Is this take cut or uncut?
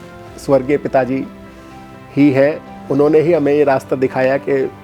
uncut